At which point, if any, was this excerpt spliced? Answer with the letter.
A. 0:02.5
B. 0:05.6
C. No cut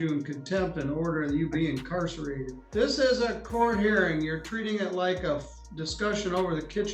A